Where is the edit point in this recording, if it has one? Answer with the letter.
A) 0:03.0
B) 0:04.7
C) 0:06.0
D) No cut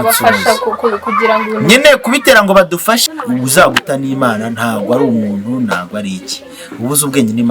A